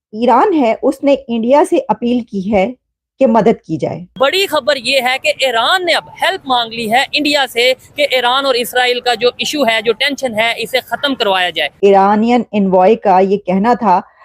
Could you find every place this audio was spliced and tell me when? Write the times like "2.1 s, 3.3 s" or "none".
4.1 s, 11.7 s